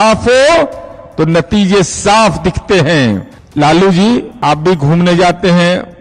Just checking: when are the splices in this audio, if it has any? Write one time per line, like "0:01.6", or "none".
0:03.4
0:04.3